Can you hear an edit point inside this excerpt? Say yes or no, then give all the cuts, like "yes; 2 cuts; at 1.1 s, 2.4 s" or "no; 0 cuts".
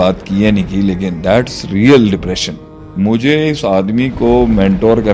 yes; 1 cut; at 2.9 s